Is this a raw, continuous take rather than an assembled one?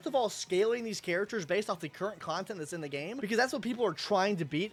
yes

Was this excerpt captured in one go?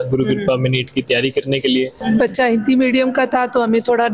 no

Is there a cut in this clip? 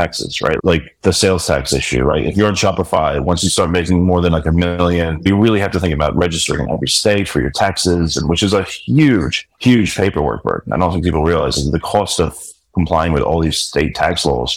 no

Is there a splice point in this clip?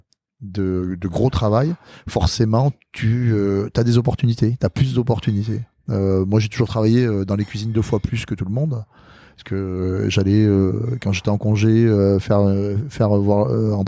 no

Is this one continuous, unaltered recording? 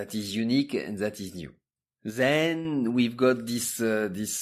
yes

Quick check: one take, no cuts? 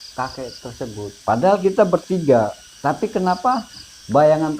no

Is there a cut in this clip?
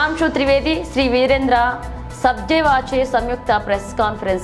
no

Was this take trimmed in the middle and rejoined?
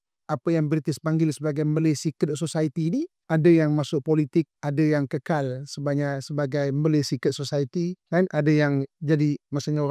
yes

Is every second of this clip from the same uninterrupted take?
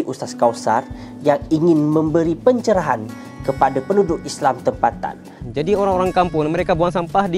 no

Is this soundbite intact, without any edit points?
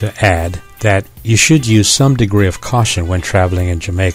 no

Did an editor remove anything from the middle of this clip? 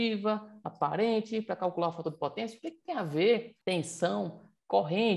yes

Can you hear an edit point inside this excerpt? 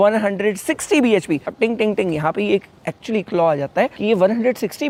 no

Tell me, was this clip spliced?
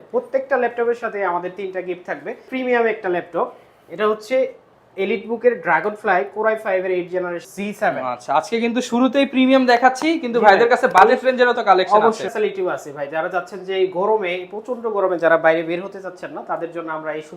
yes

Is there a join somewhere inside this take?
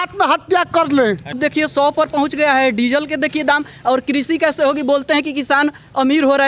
yes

